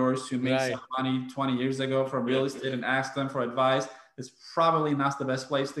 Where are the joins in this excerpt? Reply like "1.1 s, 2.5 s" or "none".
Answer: none